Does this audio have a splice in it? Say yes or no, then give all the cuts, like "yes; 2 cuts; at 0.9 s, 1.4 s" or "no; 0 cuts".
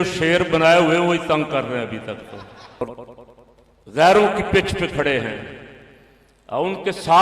yes; 1 cut; at 2.8 s